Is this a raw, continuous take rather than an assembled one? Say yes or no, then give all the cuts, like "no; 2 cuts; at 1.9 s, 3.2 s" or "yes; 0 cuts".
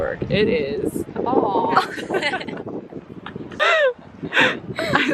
yes; 0 cuts